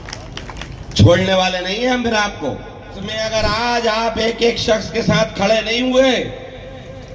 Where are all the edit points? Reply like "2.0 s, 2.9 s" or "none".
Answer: 3.2 s